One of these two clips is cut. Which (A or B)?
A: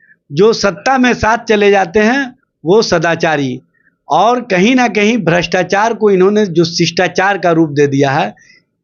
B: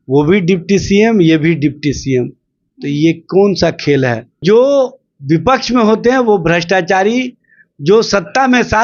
B